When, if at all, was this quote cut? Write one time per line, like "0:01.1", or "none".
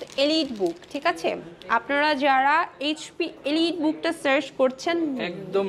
none